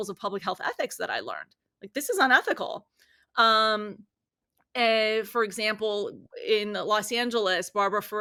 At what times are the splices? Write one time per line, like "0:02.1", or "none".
none